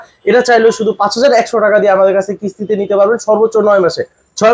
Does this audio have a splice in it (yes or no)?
no